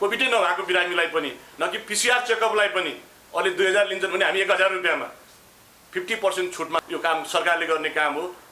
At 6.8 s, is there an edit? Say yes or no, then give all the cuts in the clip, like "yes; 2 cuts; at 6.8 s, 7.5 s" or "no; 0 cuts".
yes; 1 cut; at 6.8 s